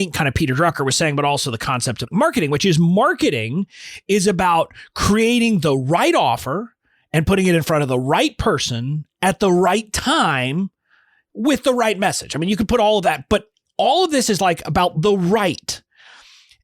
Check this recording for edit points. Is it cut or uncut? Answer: cut